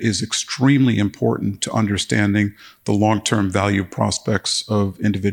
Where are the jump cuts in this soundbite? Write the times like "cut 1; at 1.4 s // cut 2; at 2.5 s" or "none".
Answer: none